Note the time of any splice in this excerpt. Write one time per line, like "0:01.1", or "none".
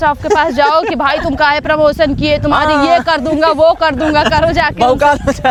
none

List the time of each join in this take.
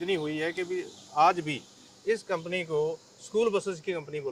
none

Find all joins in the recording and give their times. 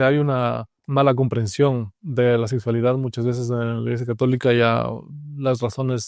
none

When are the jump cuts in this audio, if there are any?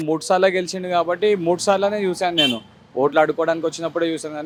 none

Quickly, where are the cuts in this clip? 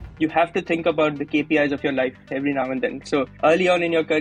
0:01.2
0:03.0

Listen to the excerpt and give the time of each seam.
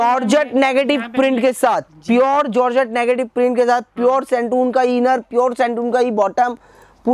none

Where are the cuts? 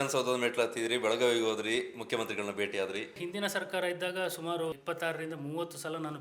0:03.2
0:04.7

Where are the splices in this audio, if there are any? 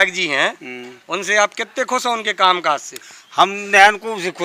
none

